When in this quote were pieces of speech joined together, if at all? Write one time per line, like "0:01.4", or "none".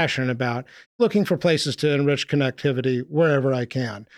0:00.9